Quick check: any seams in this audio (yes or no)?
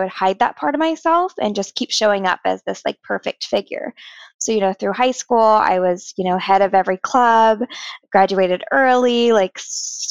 no